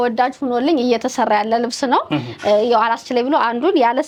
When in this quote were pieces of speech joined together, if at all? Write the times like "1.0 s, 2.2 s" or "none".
none